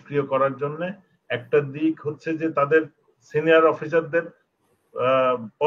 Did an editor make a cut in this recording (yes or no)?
no